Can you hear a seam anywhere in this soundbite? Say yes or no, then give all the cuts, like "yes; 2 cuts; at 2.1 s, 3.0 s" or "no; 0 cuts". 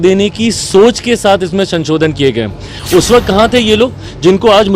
yes; 1 cut; at 2.7 s